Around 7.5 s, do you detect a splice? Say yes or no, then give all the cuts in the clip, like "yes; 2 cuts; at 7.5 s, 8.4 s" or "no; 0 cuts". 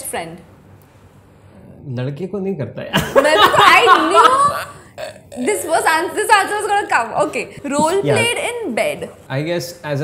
yes; 2 cuts; at 7.5 s, 9.2 s